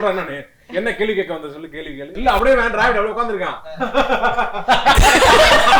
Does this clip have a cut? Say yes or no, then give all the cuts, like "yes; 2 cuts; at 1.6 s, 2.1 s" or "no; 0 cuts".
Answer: yes; 1 cut; at 2.2 s